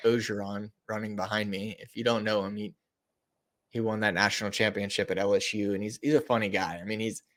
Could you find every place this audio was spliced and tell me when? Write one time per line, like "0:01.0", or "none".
none